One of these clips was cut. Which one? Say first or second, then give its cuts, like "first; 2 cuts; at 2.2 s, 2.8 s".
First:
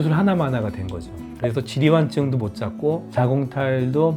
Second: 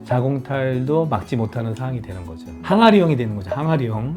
second; 1 cut; at 2.5 s